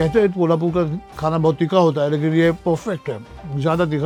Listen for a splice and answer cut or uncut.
uncut